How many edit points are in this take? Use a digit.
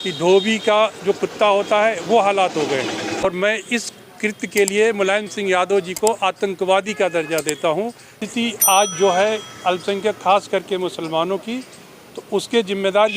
2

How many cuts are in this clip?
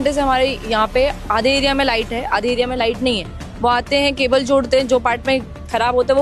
0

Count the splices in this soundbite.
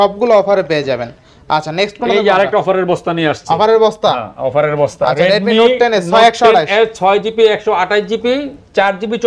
0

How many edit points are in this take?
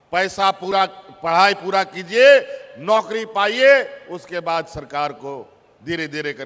0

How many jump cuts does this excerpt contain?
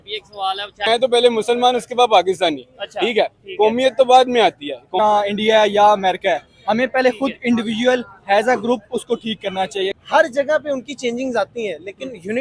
3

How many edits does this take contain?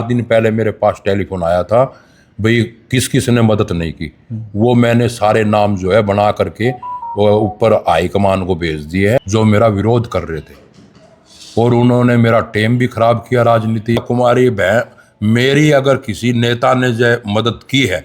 2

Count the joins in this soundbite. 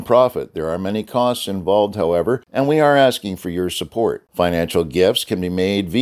1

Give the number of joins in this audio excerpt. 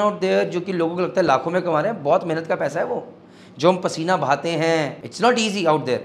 1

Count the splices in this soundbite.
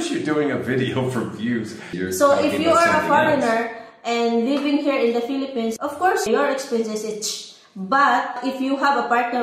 3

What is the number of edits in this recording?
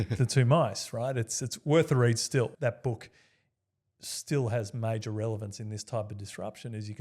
1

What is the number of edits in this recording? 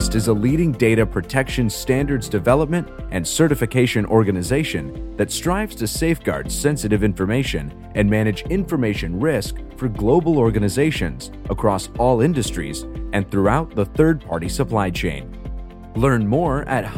0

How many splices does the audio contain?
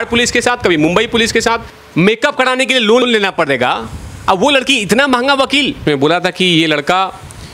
2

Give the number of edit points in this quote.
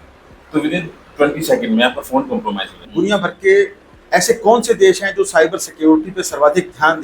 1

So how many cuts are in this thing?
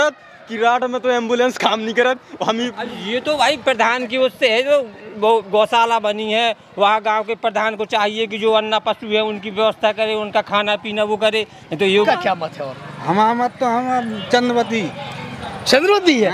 1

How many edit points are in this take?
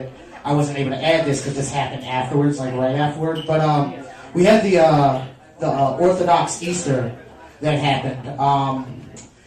1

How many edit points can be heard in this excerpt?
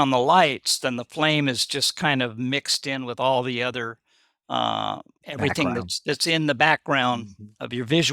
1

